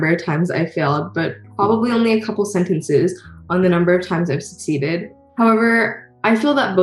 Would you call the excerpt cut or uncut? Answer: uncut